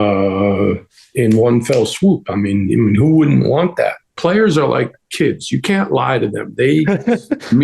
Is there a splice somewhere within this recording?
yes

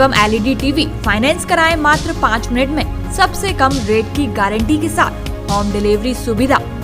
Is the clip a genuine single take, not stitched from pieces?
yes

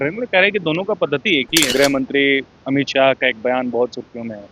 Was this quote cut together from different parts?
yes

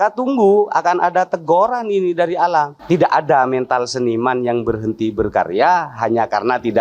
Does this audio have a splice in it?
yes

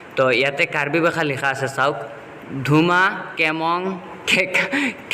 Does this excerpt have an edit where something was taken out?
yes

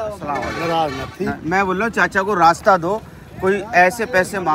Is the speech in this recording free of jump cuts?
yes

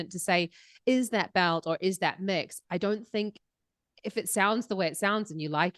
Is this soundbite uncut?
yes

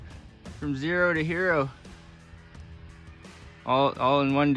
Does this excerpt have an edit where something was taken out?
no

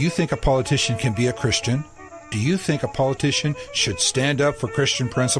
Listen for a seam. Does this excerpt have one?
no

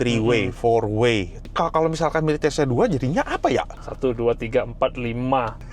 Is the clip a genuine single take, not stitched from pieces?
no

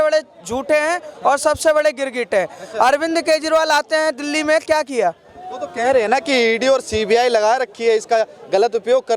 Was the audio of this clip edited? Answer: no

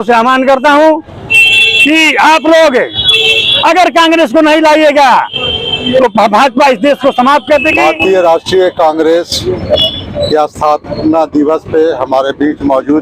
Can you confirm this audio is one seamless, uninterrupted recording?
yes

